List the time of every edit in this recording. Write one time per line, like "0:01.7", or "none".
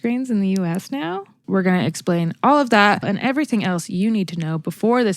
0:01.4
0:03.0